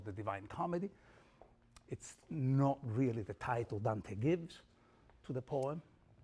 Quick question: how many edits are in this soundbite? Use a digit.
1